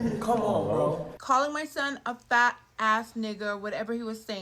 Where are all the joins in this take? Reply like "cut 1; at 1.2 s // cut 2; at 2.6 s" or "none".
cut 1; at 1.1 s